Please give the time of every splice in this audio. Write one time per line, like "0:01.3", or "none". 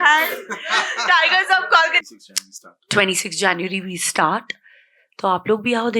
0:02.0

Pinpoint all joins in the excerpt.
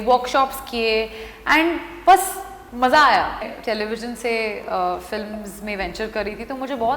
0:03.5

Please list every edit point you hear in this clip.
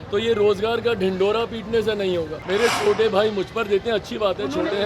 0:02.4

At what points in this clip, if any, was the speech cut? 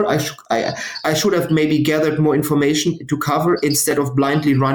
0:01.0

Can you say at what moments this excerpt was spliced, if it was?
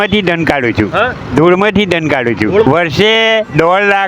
0:02.6

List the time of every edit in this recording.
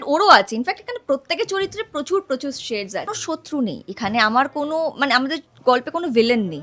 0:03.2

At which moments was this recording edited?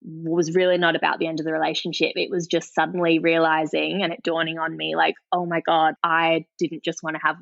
0:06.0

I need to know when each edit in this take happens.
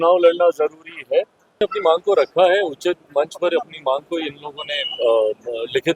0:01.6

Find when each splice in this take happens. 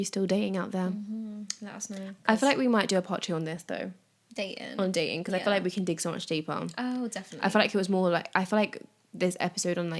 none

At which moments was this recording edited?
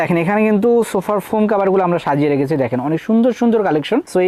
none

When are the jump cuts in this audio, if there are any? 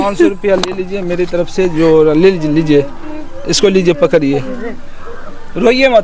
none

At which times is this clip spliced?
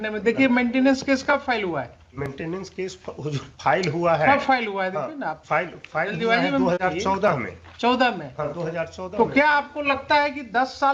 none

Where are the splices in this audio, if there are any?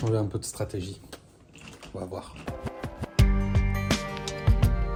none

